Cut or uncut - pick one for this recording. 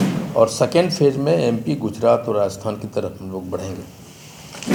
uncut